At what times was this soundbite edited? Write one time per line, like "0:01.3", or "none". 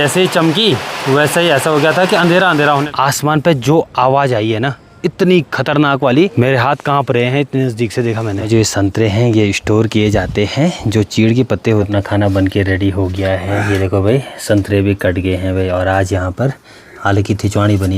0:02.8
0:06.4
0:08.5
0:11.9